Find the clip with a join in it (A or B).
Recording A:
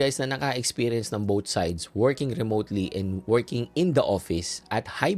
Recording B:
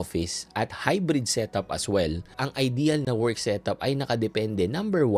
B